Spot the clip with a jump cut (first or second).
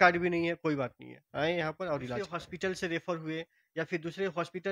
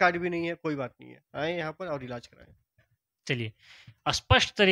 first